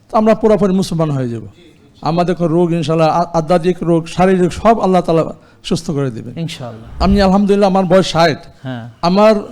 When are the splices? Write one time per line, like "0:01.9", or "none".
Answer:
0:07.0